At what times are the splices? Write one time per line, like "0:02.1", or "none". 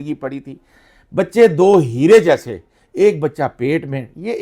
none